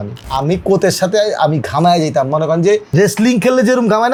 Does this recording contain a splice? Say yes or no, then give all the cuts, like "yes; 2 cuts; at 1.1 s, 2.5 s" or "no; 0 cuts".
no; 0 cuts